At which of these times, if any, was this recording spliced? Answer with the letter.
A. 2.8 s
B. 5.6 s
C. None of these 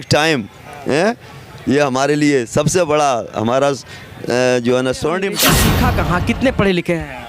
B